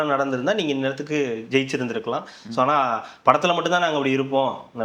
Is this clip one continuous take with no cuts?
yes; 0 cuts

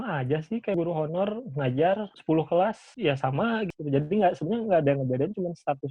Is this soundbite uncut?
no; 4 cuts; at 0.8 s, 2.1 s, 2.9 s, 3.7 s

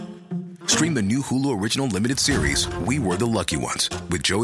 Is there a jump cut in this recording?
no; 0 cuts

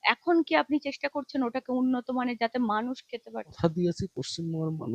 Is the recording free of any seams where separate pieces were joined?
no; 1 cut; at 3.4 s

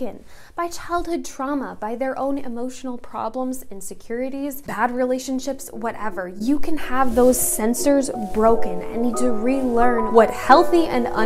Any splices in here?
yes; 2 cuts; at 4.6 s, 10.0 s

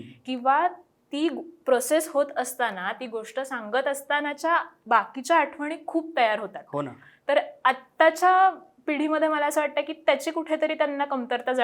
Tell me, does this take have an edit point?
no; 0 cuts

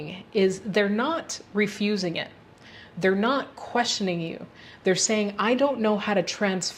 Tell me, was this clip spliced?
no; 0 cuts

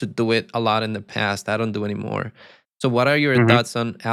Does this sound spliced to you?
no; 0 cuts

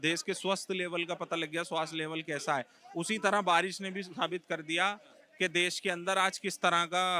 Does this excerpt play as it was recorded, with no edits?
yes; 0 cuts

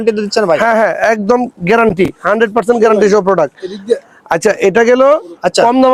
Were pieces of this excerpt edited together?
no; 0 cuts

